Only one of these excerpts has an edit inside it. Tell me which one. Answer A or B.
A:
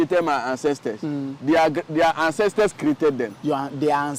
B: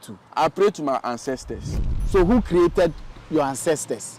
B